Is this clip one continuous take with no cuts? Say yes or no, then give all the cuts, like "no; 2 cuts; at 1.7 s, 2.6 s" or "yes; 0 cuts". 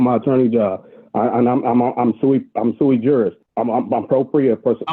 no; 1 cut; at 3.4 s